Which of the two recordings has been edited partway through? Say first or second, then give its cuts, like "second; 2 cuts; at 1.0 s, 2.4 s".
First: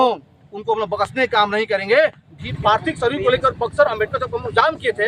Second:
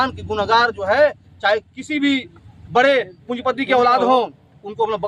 first; 1 cut; at 2.4 s